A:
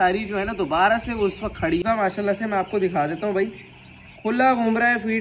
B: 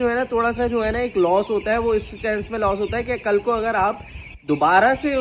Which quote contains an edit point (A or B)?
A